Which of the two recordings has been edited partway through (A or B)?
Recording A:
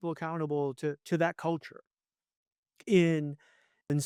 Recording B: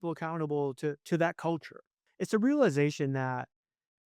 B